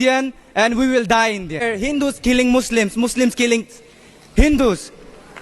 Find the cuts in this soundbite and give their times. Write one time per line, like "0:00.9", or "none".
0:01.6

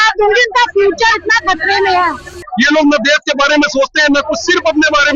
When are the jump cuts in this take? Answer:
0:02.4

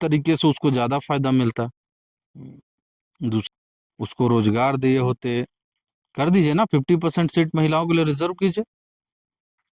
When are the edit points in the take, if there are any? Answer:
0:03.5

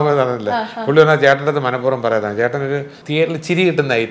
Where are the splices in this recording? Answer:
0:03.0

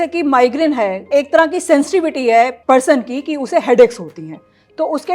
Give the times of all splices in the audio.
0:01.0
0:02.6

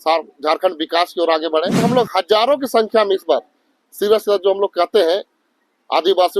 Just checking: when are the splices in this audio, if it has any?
0:01.8

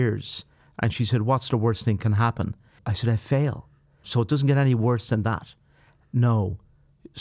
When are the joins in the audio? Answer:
0:02.8
0:04.0

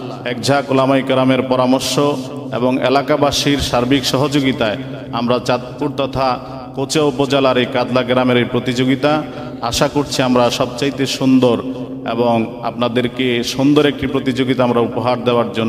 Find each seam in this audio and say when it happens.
none

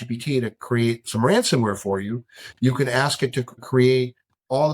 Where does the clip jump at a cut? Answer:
0:03.6

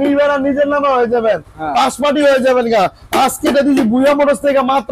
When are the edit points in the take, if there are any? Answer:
none

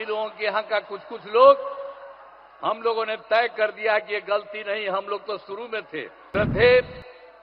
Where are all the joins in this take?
0:06.2

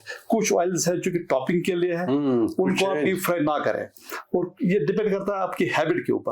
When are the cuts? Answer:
none

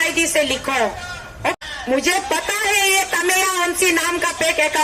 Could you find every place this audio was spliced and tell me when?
0:01.5

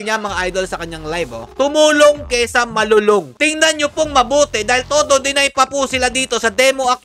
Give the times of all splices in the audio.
0:03.3

